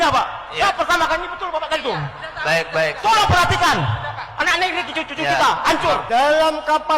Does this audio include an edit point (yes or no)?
yes